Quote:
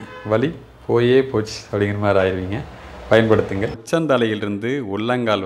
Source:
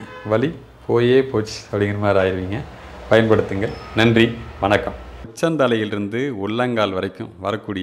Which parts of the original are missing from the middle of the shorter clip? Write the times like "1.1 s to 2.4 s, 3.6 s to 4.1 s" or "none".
3.7 s to 5.2 s